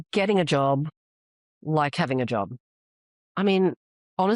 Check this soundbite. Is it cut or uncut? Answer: uncut